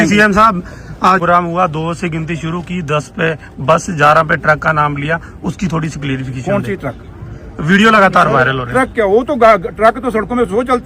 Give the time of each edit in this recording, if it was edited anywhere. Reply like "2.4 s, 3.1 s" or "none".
1.2 s